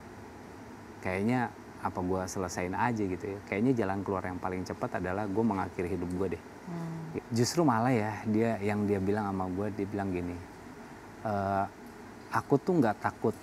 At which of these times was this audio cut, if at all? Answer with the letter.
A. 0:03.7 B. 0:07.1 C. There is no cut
B